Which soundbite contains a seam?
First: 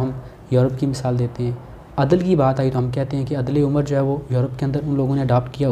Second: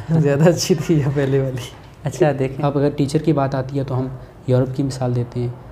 second; 1 cut; at 2.4 s

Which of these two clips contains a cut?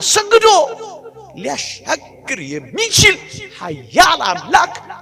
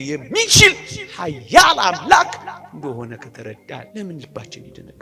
second; 1 cut; at 3.9 s

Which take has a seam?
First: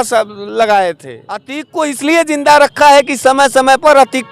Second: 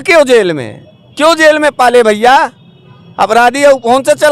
first; 1 cut; at 1.6 s

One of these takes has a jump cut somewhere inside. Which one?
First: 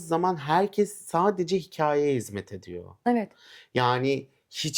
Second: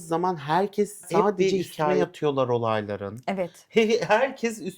second; 1 cut; at 2.0 s

